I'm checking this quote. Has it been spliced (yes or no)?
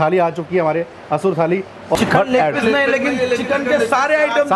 yes